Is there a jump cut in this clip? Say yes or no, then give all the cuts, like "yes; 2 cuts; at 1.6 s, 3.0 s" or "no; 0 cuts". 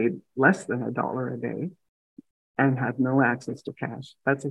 no; 0 cuts